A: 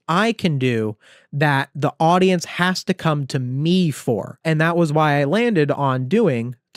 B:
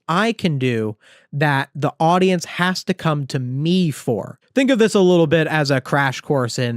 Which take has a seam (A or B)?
B